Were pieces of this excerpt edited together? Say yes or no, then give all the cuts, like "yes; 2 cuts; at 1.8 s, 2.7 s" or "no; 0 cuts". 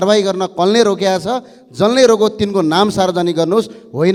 no; 0 cuts